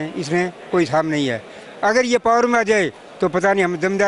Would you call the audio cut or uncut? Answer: uncut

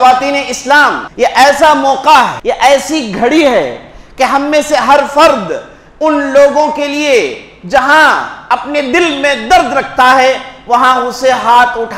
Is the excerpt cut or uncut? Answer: cut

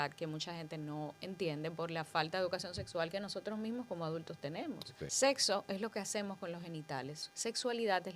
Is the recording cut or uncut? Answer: cut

